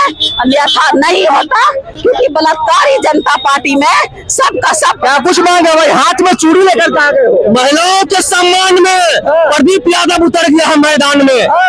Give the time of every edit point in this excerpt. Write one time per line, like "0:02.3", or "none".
none

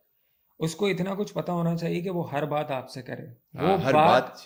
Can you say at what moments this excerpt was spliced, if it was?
none

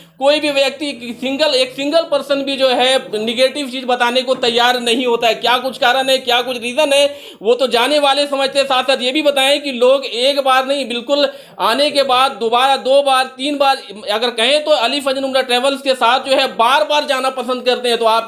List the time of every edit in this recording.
none

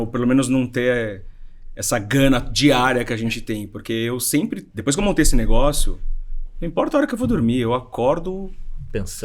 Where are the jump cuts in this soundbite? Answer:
none

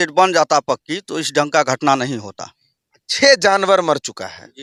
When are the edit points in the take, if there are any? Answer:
none

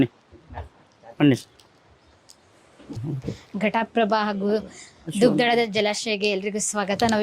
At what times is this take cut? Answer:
0:03.0

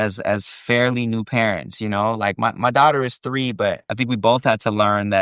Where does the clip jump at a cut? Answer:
0:03.9

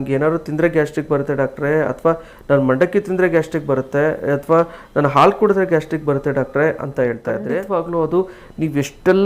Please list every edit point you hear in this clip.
0:07.4

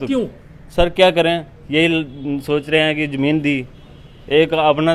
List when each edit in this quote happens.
none

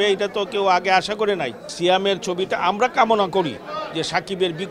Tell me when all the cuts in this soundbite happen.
0:01.6

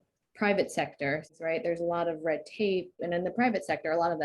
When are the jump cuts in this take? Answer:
0:01.3
0:03.0

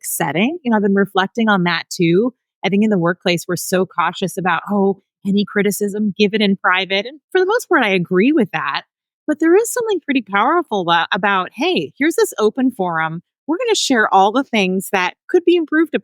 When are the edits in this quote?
none

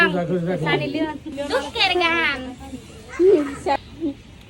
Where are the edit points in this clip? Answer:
0:01.3
0:03.8

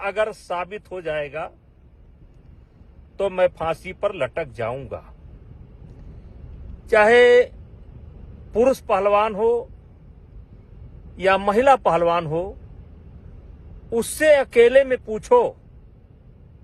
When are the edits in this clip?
0:05.3

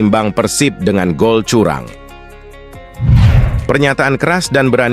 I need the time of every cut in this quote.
0:02.4
0:03.6

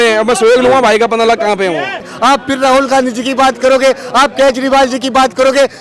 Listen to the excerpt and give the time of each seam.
0:02.1

